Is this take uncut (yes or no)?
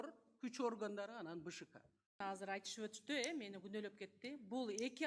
no